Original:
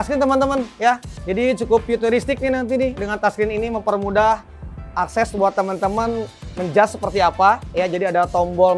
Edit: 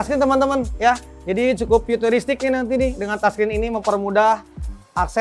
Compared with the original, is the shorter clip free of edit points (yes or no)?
yes